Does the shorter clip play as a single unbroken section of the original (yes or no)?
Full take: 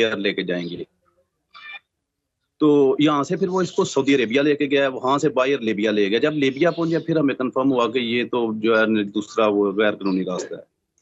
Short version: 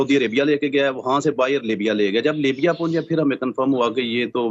yes